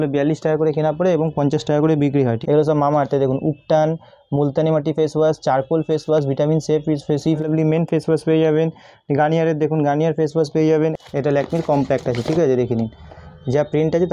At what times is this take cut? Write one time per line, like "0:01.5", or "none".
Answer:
0:02.4
0:07.4
0:10.9